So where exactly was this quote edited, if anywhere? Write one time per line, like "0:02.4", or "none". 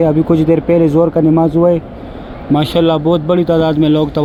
none